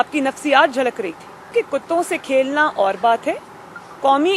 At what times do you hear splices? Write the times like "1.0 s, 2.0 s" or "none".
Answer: 1.5 s